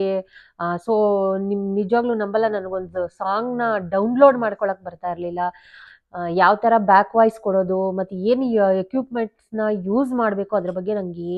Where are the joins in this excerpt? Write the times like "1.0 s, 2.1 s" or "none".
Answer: none

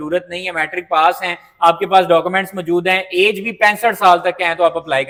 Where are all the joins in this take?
none

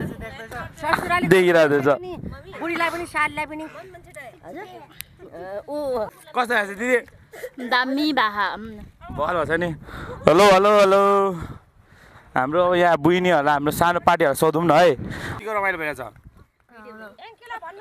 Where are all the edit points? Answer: 6.2 s, 15.3 s

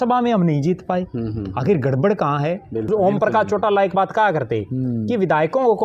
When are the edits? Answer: 2.9 s

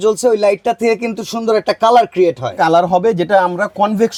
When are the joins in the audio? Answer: none

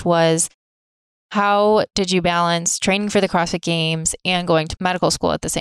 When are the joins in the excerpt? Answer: 4.7 s

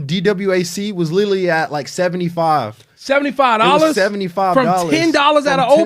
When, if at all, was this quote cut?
none

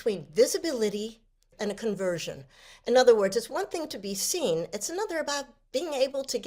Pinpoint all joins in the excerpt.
1.5 s

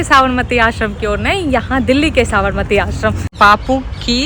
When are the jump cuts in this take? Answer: 3.3 s

